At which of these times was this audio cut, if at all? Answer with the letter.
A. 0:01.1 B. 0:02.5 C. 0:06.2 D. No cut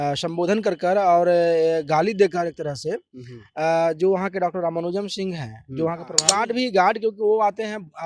C